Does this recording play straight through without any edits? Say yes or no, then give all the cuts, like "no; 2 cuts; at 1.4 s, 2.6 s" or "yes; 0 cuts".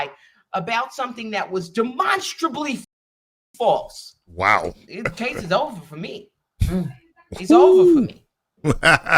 yes; 0 cuts